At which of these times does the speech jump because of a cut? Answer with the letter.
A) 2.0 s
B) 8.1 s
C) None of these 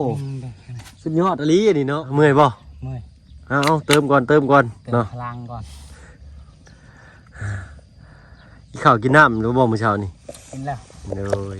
A